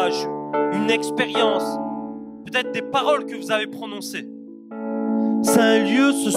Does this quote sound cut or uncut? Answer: cut